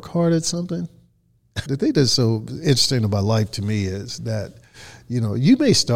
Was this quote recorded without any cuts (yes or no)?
no